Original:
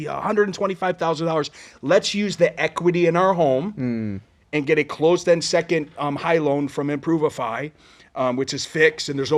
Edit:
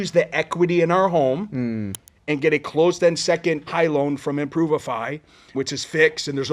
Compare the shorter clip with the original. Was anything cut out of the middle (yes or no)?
yes